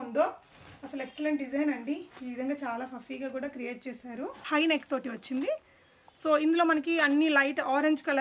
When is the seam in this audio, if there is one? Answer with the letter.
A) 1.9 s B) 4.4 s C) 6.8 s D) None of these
B